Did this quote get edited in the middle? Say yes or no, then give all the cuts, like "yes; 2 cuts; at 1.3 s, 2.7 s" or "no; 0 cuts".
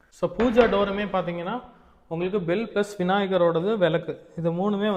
no; 0 cuts